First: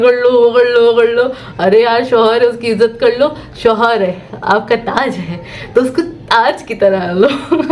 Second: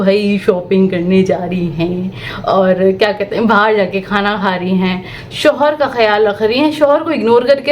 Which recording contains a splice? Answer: second; 1 cut; at 5.2 s

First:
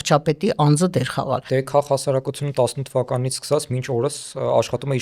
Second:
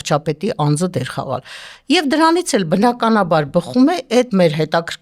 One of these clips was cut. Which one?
first; 1 cut; at 1.4 s

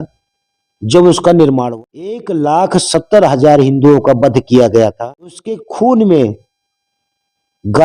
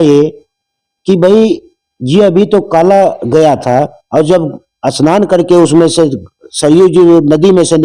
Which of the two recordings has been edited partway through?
first; 2 cuts; at 1.7 s, 5.6 s

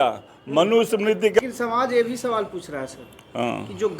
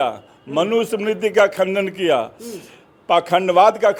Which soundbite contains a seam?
first; 1 cut; at 1.4 s

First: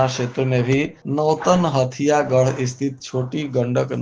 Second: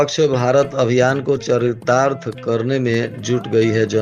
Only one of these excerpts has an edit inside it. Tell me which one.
first; 1 cut; at 1.0 s

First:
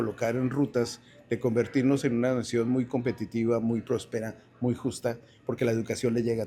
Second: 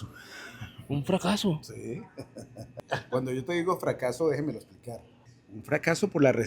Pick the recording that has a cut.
second; 1 cut; at 2.7 s

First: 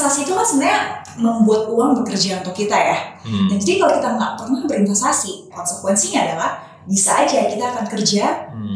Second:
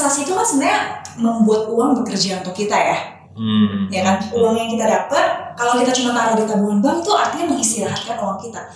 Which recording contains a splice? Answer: first; 2 cuts; at 3.2 s, 5.7 s

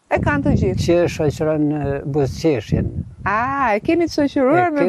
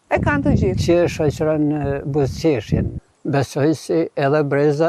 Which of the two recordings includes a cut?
second; 1 cut; at 3.0 s

